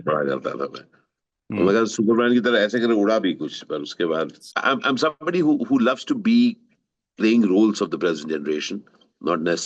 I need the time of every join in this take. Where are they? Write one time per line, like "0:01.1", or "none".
0:04.4

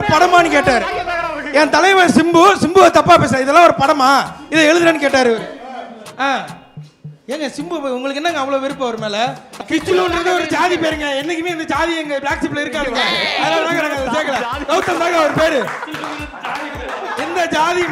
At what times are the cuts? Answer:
0:09.5

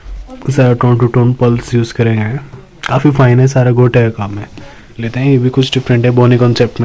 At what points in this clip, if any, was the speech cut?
0:05.0

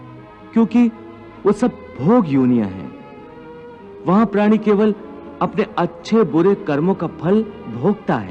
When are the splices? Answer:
none

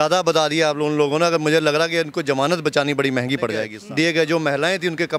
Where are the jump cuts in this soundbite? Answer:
0:03.8

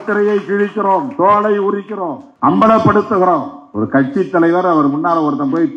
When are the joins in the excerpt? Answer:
0:02.2
0:03.6

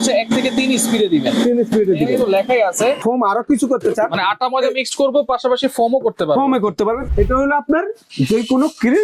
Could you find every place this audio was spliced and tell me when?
0:03.0
0:07.0

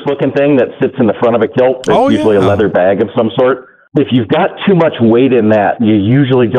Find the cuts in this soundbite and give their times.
0:03.7

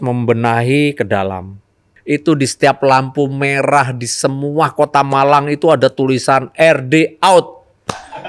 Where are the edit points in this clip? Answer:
0:01.9

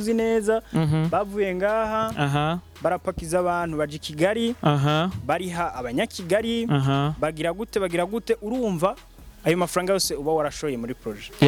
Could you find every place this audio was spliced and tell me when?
none

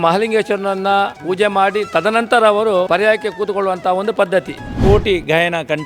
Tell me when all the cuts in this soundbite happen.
0:01.2
0:02.9
0:04.6

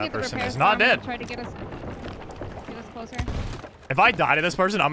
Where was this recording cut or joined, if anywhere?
0:03.8

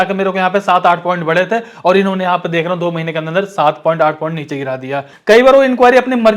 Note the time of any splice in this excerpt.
0:05.1

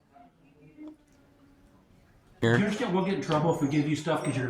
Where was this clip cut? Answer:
0:02.4

